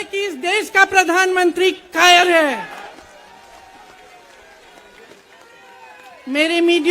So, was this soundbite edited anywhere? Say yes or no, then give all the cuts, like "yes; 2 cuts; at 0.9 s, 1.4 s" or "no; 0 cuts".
yes; 1 cut; at 2.8 s